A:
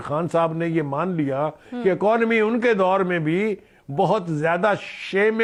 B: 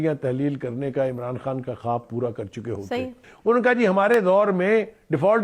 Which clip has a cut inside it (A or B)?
B